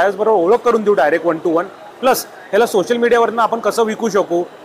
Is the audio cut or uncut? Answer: uncut